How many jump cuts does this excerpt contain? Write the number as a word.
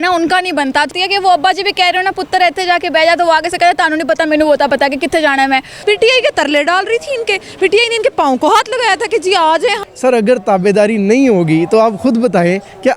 three